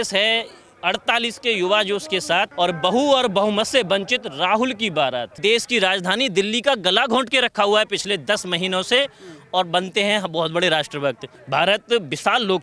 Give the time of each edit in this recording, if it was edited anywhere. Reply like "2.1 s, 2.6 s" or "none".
5.4 s, 11.3 s